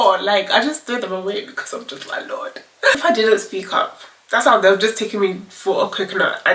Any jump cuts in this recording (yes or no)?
yes